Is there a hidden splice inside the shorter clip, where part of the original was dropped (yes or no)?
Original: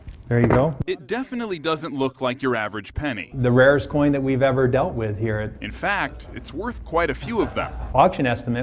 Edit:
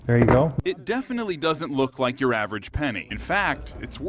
yes